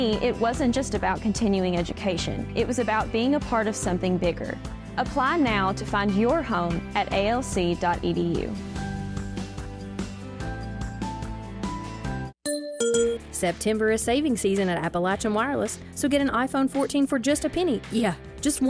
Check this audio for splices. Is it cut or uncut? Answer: cut